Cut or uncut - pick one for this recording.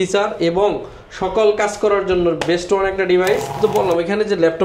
cut